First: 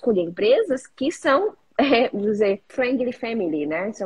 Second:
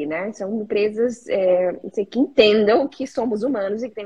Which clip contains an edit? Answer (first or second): first